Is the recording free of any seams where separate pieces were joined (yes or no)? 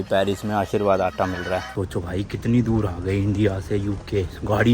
no